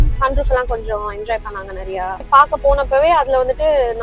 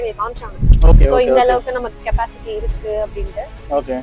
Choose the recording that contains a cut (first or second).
first